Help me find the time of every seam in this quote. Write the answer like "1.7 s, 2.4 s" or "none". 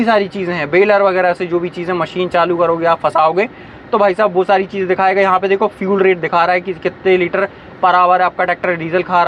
none